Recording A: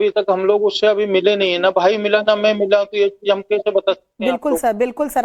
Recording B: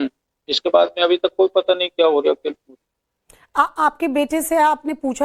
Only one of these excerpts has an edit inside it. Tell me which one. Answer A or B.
A